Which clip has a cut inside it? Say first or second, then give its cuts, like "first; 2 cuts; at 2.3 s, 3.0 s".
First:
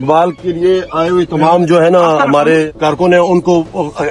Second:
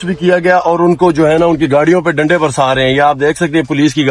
first; 1 cut; at 2.7 s